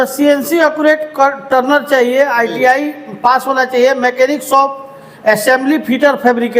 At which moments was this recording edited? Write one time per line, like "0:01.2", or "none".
none